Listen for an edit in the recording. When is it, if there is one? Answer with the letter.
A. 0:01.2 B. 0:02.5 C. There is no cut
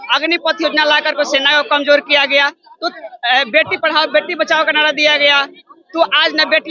C